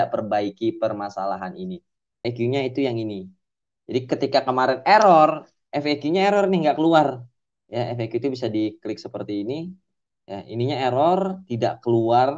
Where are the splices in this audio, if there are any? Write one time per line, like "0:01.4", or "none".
0:02.2